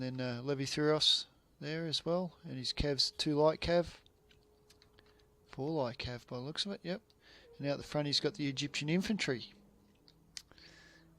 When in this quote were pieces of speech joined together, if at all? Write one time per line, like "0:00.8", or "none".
0:08.6